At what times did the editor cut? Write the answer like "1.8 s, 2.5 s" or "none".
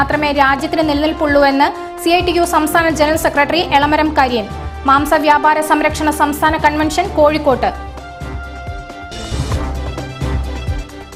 none